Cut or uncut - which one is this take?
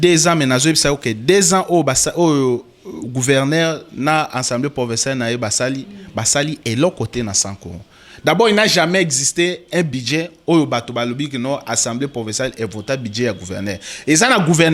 uncut